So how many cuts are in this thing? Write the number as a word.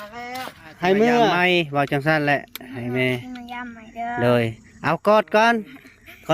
one